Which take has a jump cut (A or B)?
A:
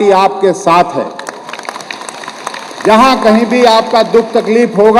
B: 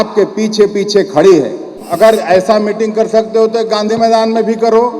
B